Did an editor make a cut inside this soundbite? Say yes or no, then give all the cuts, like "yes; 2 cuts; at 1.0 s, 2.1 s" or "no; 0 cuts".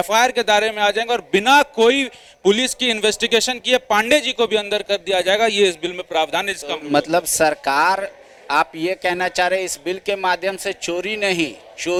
no; 0 cuts